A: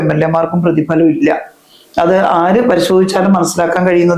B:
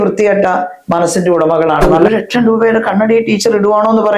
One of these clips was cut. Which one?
B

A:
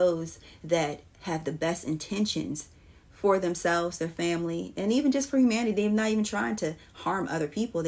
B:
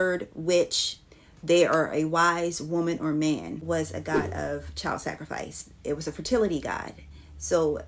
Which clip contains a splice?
B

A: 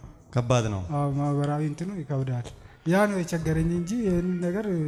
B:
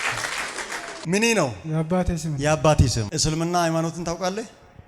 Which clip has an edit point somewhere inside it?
B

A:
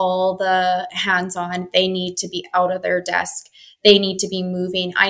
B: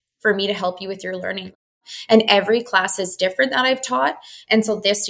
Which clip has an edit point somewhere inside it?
B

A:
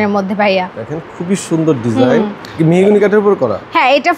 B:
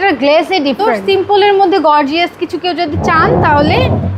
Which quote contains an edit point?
B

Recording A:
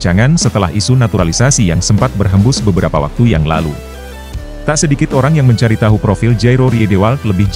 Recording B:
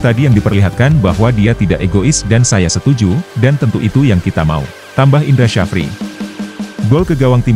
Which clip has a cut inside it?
B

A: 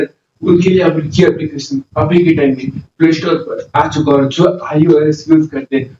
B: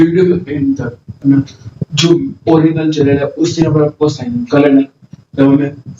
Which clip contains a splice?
B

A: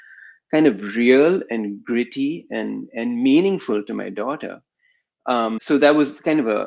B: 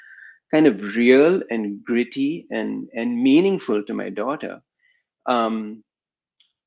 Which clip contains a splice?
A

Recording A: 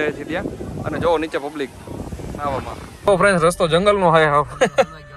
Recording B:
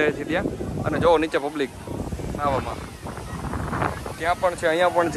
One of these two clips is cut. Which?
A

